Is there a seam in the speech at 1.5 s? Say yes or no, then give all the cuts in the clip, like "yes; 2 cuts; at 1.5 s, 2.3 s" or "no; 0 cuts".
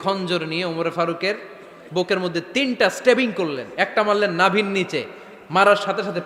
no; 0 cuts